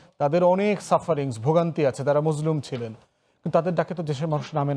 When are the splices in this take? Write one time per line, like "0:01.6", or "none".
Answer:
none